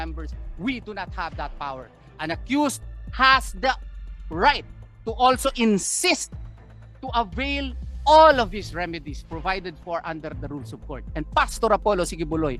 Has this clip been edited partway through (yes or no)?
no